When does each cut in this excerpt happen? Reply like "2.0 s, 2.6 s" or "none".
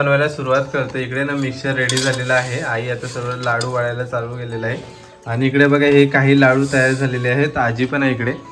none